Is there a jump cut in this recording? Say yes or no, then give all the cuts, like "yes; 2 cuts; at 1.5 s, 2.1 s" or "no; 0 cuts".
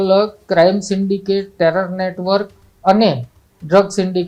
no; 0 cuts